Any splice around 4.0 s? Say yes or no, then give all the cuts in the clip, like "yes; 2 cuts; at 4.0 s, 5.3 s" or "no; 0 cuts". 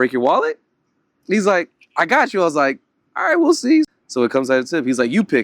yes; 1 cut; at 4.0 s